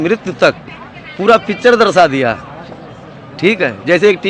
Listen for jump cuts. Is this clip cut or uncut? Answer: uncut